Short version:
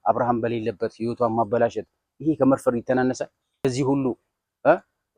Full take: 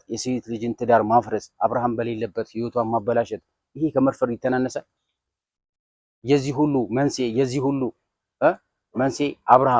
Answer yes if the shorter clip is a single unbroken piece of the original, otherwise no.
no